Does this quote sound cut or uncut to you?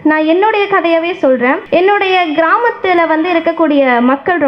cut